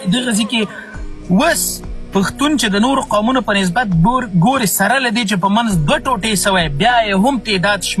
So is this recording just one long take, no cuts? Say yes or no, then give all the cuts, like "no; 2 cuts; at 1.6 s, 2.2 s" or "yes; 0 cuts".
yes; 0 cuts